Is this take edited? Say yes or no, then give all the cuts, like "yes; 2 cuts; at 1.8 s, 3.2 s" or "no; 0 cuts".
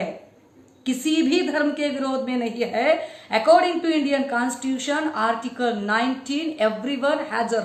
no; 0 cuts